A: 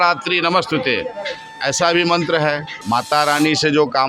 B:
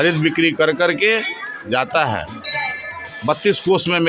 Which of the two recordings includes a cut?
A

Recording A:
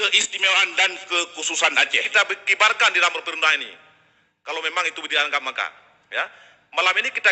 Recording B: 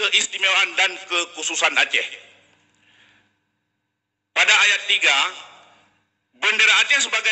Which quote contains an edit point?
A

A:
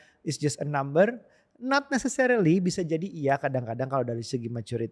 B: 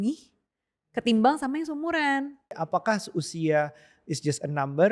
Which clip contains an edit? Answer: B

